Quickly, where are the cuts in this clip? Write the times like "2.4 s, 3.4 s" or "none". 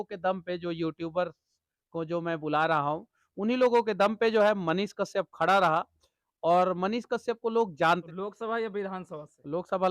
8.0 s

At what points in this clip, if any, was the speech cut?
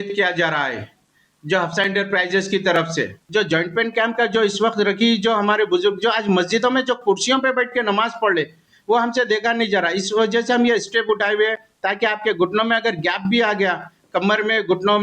3.2 s

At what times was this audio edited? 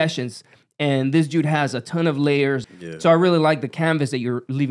2.6 s

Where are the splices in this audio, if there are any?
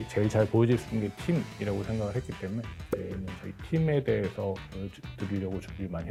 none

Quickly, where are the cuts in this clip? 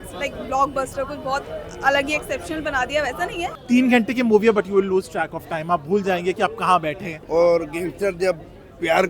3.6 s, 7.1 s

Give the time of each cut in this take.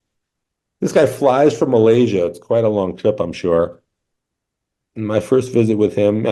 none

